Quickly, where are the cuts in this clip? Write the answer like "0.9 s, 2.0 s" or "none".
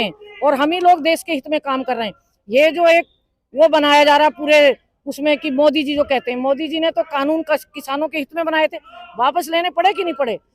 none